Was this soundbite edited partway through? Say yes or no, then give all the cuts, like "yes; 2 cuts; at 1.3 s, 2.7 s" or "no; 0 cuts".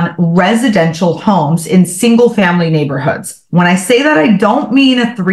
no; 0 cuts